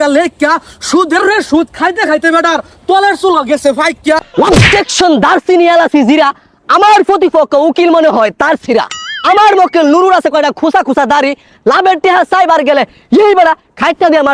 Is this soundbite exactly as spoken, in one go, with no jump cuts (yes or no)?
no